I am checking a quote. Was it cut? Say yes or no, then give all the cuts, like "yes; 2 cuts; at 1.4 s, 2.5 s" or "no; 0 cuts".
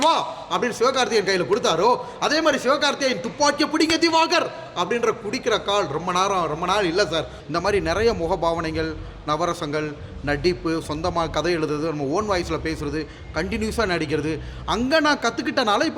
yes; 1 cut; at 7.4 s